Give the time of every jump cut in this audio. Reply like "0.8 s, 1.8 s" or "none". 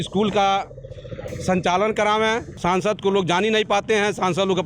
2.5 s

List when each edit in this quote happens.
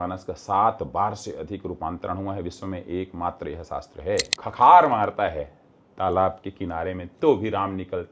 4.4 s

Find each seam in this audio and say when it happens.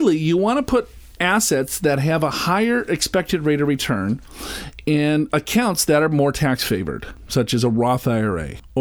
none

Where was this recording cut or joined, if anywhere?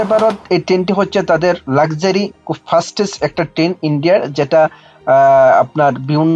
none

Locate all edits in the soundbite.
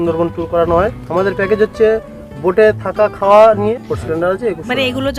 3.7 s

